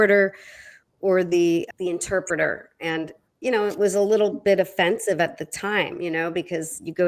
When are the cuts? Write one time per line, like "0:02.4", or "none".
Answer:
0:01.7

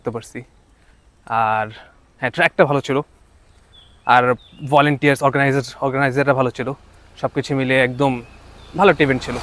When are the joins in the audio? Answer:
none

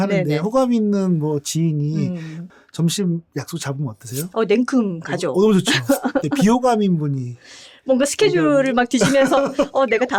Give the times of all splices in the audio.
none

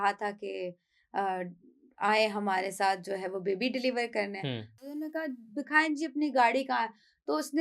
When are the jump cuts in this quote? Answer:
0:04.8

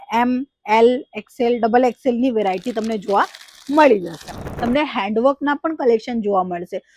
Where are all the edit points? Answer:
0:04.5

